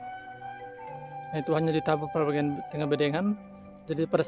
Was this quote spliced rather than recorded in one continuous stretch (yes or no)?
yes